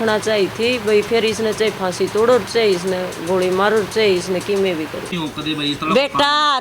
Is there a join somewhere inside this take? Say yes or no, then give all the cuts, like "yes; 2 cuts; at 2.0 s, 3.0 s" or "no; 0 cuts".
yes; 1 cut; at 5.2 s